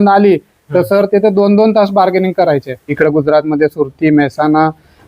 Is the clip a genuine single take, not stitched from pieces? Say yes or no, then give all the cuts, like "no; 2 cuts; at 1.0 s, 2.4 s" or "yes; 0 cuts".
no; 1 cut; at 3.0 s